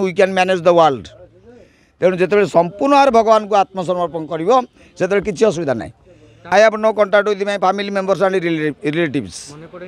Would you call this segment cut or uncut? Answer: cut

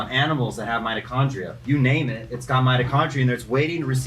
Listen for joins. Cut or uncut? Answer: cut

